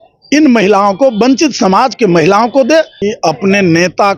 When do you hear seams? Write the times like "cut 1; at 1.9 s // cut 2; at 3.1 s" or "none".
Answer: cut 1; at 3.0 s